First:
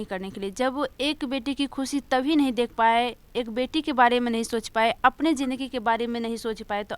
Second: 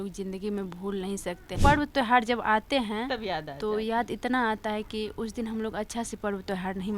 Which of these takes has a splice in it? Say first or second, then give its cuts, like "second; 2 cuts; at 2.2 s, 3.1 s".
second; 1 cut; at 1.6 s